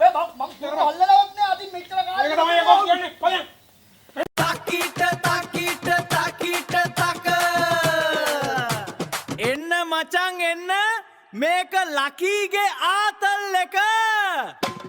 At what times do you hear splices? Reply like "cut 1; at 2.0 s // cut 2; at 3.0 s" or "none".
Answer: cut 1; at 4.2 s